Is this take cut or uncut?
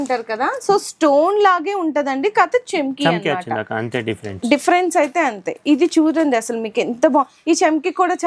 uncut